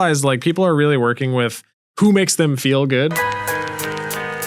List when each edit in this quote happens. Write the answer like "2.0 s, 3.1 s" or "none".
3.2 s